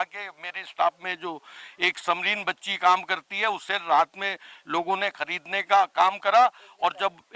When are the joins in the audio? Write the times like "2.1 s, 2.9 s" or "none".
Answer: none

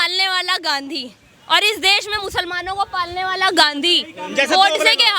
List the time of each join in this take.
none

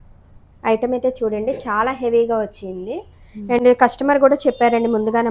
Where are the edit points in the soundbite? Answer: none

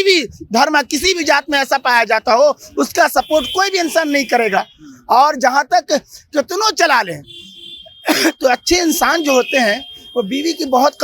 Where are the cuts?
none

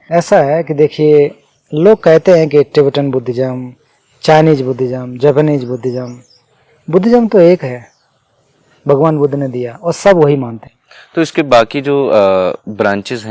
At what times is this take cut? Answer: none

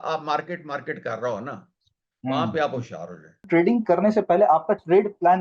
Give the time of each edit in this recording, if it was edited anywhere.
3.5 s

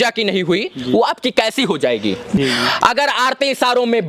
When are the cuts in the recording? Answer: 2.4 s

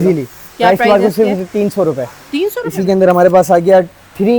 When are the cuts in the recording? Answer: 2.6 s

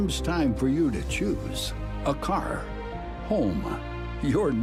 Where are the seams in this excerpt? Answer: none

